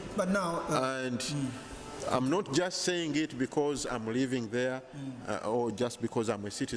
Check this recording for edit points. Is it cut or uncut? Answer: uncut